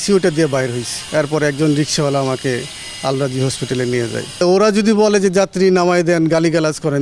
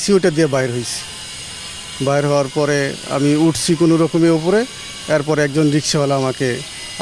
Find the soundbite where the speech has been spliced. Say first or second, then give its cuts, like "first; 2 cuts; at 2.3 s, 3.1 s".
first; 2 cuts; at 0.9 s, 4.4 s